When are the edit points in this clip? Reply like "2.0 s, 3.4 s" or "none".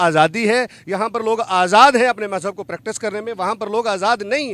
none